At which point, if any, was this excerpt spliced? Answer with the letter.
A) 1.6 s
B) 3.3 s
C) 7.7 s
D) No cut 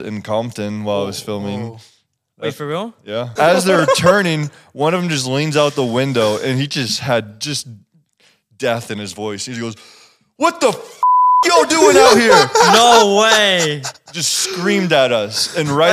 B